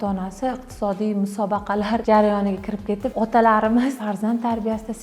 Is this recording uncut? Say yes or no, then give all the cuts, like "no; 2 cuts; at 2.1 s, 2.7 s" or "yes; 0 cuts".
no; 3 cuts; at 2.0 s, 3.1 s, 4.0 s